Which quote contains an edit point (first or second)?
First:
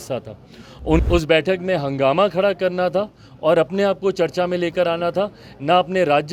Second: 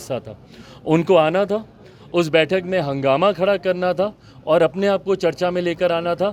first